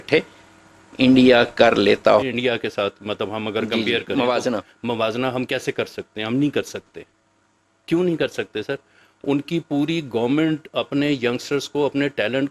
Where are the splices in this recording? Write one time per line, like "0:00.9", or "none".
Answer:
0:02.2